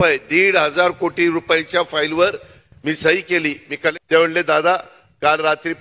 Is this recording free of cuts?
no; 1 cut; at 4.0 s

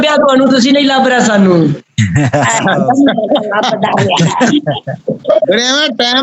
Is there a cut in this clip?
no; 0 cuts

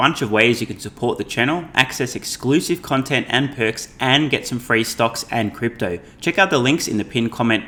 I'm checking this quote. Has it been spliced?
no; 0 cuts

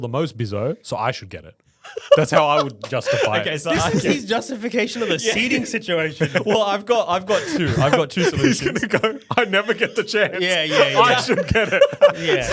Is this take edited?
no; 0 cuts

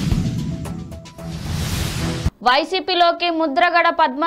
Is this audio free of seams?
no; 1 cut; at 2.3 s

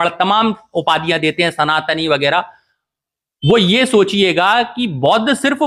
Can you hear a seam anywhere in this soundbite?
no; 0 cuts

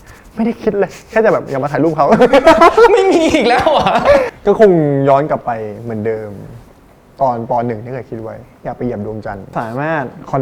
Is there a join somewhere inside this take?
yes; 2 cuts; at 4.3 s, 9.5 s

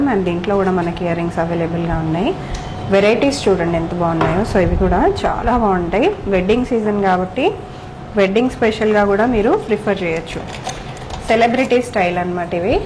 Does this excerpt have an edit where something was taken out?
no; 0 cuts

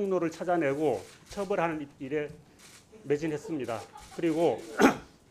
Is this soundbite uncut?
yes; 0 cuts

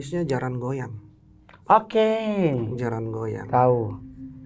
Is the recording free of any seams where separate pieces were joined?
yes; 0 cuts

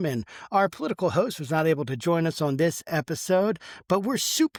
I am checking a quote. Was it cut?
no; 0 cuts

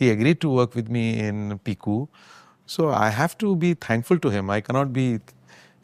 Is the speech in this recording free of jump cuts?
yes; 0 cuts

